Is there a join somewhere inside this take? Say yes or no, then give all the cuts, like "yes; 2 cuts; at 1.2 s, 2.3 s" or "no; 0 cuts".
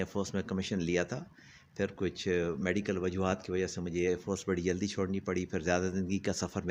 no; 0 cuts